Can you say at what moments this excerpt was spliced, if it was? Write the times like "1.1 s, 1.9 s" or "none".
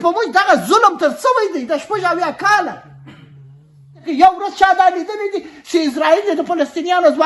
4.0 s